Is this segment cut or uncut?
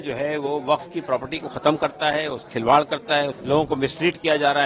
cut